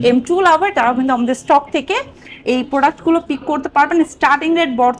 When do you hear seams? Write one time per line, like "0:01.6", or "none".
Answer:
none